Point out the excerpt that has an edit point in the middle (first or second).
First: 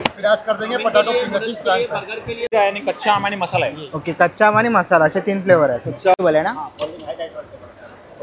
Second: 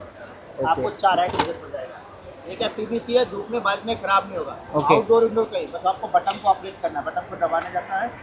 first